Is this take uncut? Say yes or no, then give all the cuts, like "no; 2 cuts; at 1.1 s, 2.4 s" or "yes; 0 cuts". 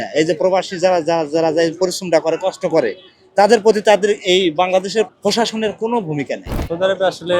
no; 2 cuts; at 5.1 s, 6.6 s